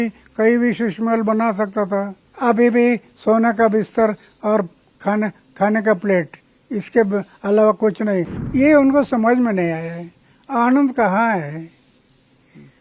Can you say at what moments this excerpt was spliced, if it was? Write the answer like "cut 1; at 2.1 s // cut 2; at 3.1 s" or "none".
cut 1; at 2.2 s // cut 2; at 8.4 s